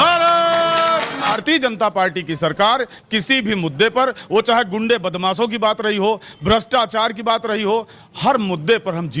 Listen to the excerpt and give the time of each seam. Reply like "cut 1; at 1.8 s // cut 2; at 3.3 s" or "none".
cut 1; at 1.4 s